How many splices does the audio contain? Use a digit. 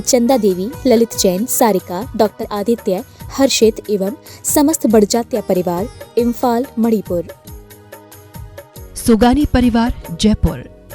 1